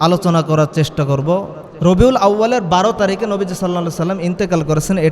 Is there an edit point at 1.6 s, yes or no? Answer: yes